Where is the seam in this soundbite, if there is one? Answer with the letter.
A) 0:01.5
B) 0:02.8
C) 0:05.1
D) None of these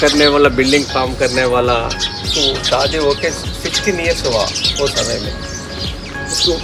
D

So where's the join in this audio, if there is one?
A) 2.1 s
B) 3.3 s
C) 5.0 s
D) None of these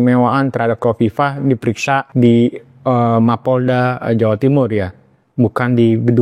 A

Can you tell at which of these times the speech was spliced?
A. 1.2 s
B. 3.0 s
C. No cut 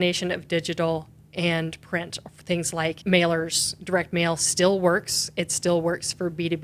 B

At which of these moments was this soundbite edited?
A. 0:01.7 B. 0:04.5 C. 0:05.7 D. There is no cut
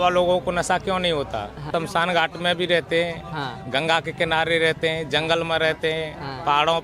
A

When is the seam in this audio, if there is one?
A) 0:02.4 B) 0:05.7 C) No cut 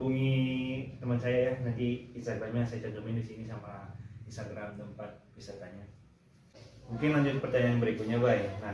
C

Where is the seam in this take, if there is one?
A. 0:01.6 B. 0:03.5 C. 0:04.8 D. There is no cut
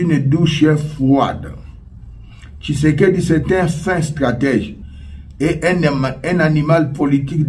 C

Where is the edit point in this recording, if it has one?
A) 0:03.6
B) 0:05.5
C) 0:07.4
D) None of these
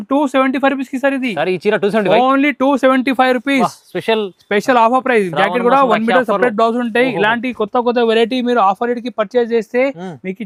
D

